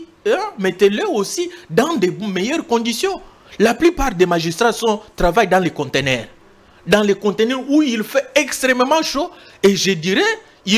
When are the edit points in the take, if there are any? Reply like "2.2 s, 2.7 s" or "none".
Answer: none